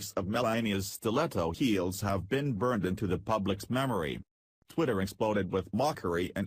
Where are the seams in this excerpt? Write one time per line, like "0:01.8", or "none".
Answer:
0:02.7